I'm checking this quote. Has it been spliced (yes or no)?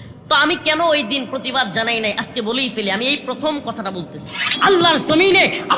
yes